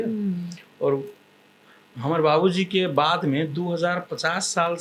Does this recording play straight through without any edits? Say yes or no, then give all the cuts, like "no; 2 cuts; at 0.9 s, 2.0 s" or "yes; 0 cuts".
yes; 0 cuts